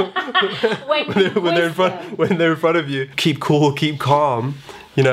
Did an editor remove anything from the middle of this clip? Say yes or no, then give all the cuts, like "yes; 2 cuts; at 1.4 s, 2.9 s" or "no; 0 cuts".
yes; 1 cut; at 3.1 s